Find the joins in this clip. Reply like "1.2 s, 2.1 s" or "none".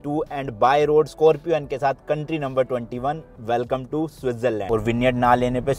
4.6 s

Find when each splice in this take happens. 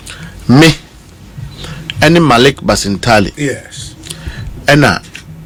none

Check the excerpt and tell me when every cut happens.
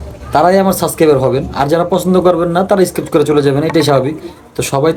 none

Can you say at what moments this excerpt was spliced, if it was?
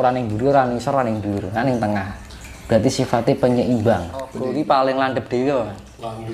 4.4 s

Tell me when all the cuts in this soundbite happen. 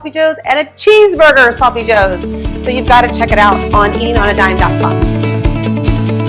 4.7 s

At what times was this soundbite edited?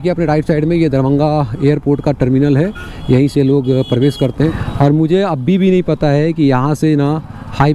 4.5 s

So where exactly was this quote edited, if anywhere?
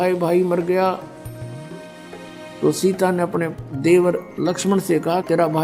1.2 s, 2.6 s

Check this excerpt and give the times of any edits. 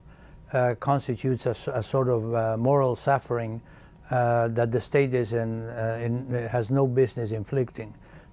4.7 s

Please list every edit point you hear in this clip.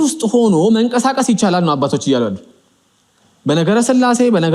none

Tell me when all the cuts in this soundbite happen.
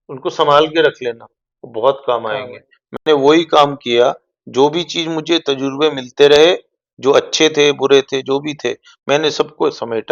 none

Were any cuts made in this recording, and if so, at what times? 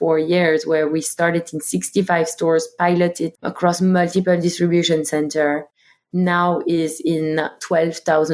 3.3 s

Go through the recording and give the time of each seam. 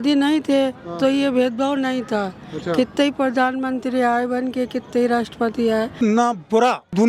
6.0 s

